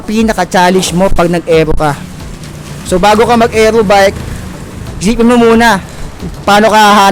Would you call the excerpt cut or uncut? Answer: uncut